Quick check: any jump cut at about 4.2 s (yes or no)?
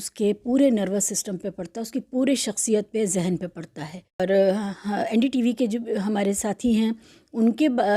yes